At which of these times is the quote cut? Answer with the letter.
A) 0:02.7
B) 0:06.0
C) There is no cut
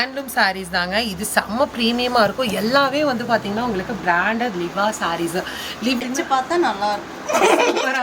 B